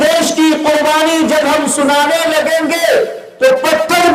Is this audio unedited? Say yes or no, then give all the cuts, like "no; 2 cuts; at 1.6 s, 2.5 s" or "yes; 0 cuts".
yes; 0 cuts